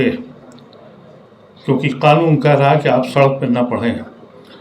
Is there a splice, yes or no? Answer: no